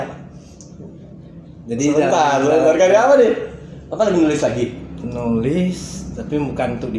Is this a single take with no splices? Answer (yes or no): yes